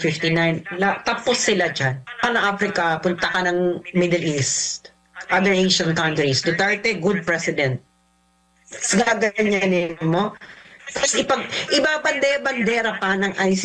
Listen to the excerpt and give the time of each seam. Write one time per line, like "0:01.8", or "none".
0:02.2

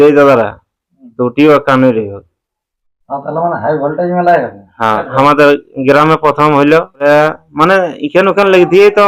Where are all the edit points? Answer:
0:05.1
0:07.0

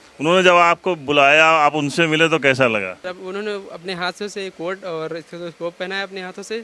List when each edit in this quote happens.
0:03.0

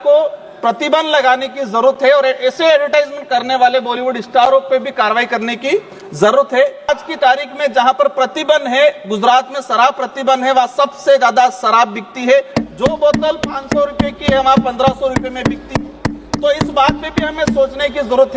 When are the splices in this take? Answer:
0:06.9

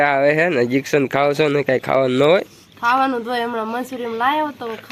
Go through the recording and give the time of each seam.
none

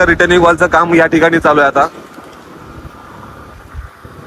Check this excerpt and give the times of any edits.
none

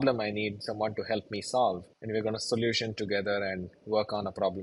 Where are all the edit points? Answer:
0:01.9

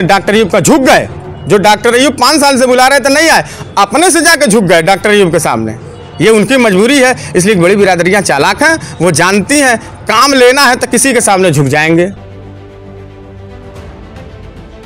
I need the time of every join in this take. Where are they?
0:12.2

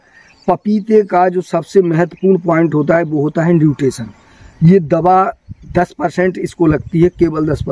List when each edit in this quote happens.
none

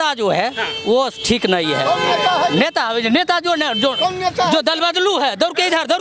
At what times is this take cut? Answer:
none

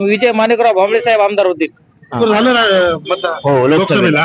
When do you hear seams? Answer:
0:02.1

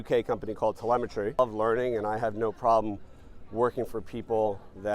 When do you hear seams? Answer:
0:01.4

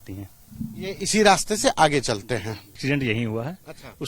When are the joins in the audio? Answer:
0:02.8

